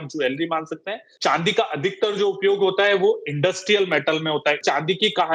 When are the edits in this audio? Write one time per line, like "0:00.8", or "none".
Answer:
0:01.1
0:04.6